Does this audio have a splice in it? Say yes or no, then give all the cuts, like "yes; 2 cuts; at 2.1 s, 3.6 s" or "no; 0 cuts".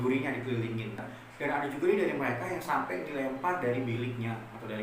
yes; 1 cut; at 1.0 s